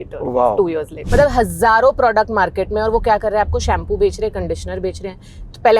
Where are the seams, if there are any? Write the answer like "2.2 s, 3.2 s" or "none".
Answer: 1.0 s